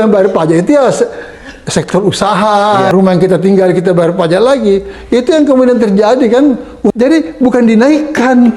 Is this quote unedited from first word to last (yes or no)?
no